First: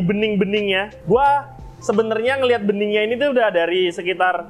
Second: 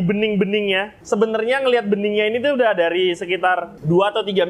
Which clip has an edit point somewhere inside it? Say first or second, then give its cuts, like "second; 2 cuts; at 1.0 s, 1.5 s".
second; 1 cut; at 0.9 s